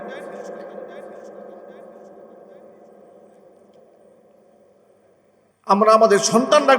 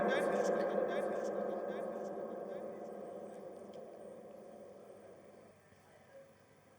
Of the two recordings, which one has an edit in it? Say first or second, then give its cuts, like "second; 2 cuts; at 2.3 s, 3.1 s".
first; 1 cut; at 5.5 s